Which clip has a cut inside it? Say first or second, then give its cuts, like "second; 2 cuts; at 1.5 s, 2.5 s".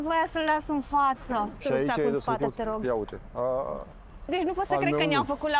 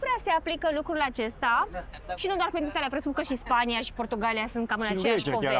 first; 2 cuts; at 1.6 s, 4.3 s